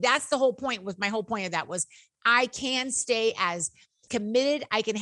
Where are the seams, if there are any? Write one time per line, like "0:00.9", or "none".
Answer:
0:04.0